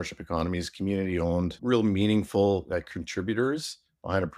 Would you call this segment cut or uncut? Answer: cut